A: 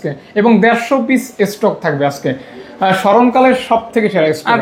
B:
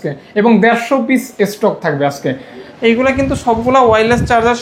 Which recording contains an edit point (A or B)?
B